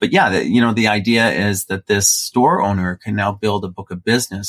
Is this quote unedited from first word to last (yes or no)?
yes